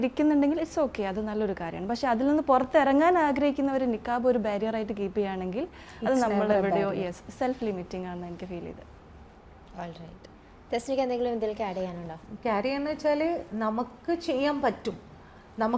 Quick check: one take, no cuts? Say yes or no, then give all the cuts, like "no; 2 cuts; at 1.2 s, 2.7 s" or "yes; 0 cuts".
yes; 0 cuts